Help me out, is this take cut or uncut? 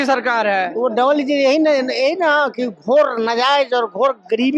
uncut